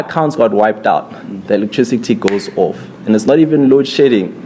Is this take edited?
no; 0 cuts

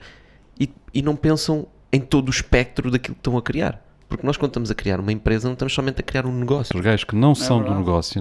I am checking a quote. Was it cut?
yes; 1 cut; at 6.7 s

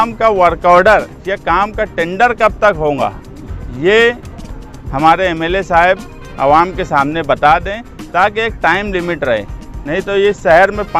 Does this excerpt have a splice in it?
no; 0 cuts

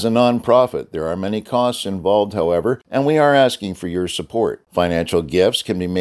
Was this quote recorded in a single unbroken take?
no; 1 cut; at 2.8 s

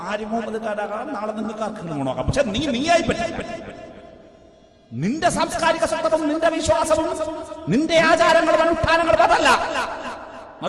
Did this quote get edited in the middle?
no; 0 cuts

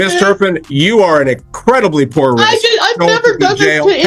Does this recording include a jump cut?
no; 0 cuts

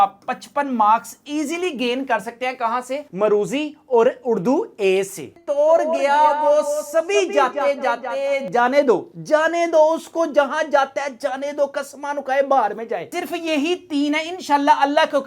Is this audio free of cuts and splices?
no; 2 cuts; at 5.4 s, 13.1 s

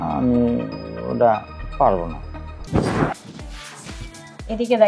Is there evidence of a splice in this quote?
yes; 1 cut; at 2.5 s

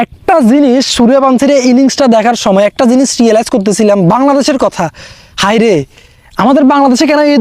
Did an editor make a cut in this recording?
no; 0 cuts

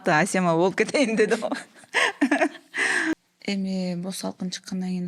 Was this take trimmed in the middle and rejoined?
yes; 1 cut; at 3.1 s

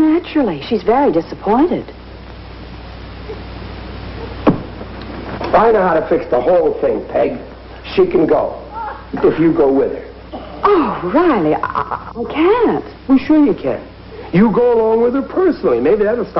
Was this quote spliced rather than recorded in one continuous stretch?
yes; 1 cut; at 11.9 s

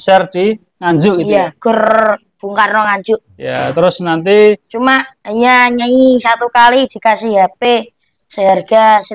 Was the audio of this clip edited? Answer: no; 0 cuts

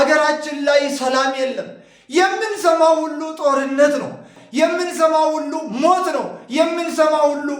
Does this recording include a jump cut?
yes; 1 cut; at 4.3 s

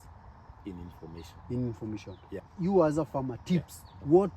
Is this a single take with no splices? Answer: no; 1 cut; at 2.5 s

